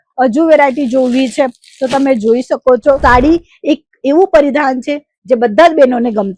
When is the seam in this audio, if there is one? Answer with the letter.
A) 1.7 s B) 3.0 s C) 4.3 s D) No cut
B